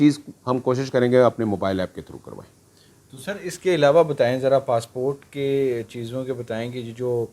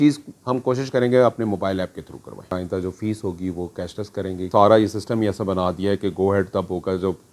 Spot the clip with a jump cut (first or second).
second